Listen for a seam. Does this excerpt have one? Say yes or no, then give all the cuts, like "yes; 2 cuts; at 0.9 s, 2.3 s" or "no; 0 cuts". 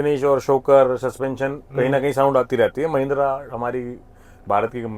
no; 0 cuts